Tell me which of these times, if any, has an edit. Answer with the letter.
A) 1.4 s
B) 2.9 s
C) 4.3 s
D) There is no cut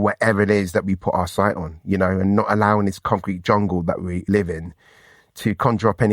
C